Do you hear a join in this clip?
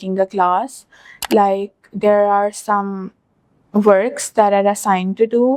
no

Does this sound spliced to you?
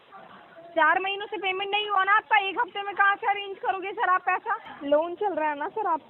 yes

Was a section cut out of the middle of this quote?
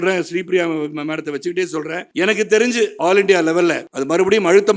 yes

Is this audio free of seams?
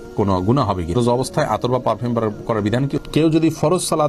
no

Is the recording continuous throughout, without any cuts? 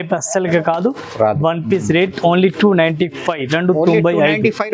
yes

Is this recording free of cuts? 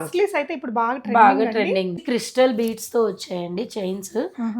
no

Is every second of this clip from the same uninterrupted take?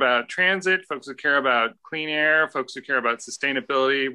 yes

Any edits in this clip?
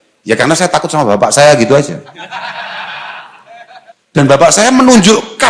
yes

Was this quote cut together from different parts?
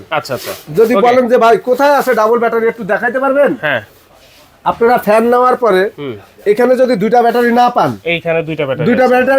no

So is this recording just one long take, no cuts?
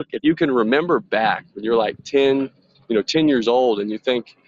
yes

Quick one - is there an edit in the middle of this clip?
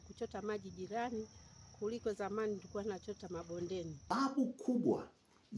yes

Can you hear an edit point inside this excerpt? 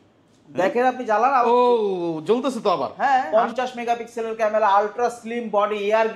yes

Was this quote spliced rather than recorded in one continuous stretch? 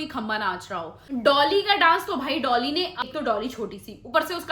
yes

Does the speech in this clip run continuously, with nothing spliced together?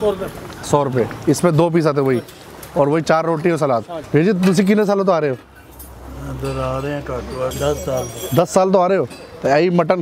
no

